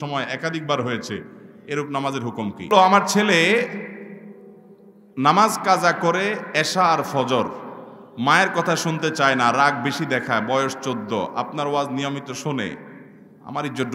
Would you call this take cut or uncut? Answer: cut